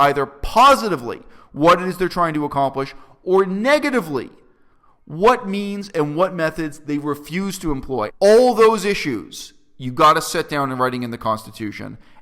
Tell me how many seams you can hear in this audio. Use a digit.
1